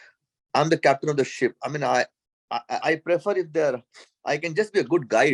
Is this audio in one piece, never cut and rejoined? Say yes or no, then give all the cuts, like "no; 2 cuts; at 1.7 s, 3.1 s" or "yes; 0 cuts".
yes; 0 cuts